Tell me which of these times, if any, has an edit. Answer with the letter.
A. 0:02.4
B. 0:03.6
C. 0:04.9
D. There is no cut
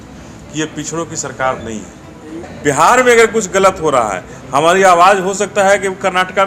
A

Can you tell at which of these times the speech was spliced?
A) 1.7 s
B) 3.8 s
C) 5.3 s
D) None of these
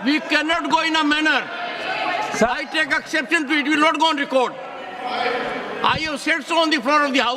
D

